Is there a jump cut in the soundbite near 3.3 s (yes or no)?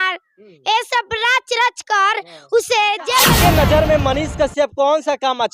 yes